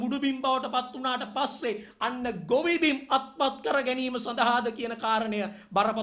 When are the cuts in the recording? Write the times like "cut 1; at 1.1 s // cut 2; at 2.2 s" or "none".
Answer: none

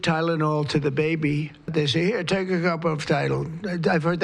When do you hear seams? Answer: cut 1; at 1.7 s

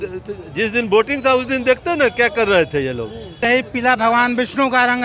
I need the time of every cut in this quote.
cut 1; at 3.5 s

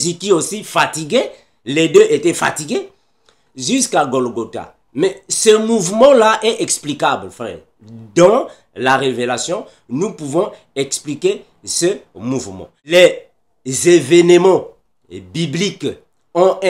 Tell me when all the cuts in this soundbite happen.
cut 1; at 12.9 s

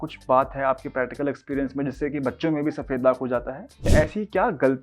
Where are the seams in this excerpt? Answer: cut 1; at 3.8 s

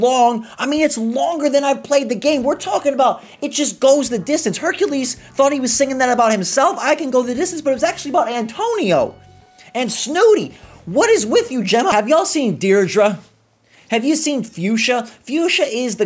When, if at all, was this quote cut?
cut 1; at 11.9 s

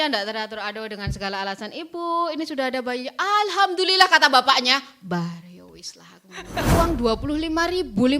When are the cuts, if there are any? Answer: cut 1; at 6.7 s

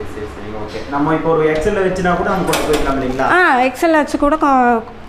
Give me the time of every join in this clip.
none

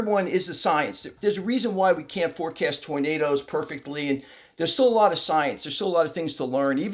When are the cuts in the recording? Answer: cut 1; at 1.1 s

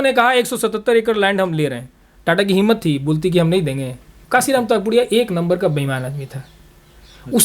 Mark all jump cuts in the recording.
cut 1; at 4.1 s

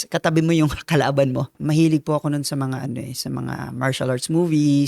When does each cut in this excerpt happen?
cut 1; at 1.6 s

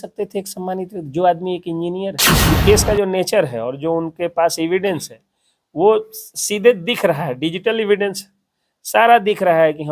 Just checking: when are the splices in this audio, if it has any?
cut 1; at 2.3 s

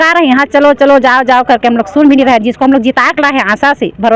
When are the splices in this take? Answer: none

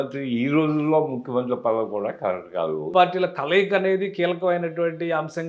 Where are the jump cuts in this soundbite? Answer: cut 1; at 2.9 s

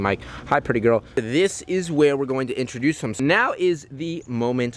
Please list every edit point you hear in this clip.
cut 1; at 1.2 s // cut 2; at 3.2 s

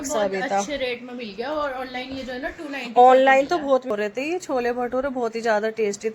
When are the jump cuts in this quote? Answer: cut 1; at 3.9 s

